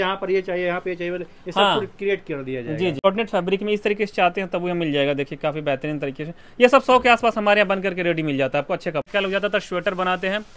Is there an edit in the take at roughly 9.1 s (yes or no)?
yes